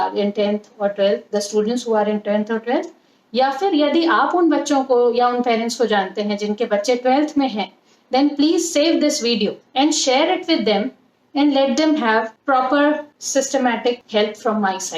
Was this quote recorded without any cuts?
no; 4 cuts; at 9.6 s, 12.3 s, 13.1 s, 14.0 s

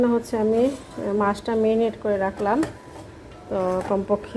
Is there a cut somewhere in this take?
no; 0 cuts

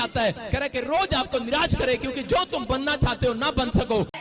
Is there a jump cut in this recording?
no; 0 cuts

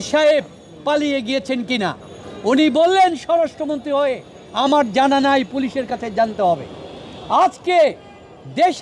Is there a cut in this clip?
no; 0 cuts

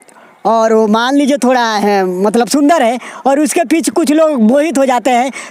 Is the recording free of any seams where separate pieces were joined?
yes; 0 cuts

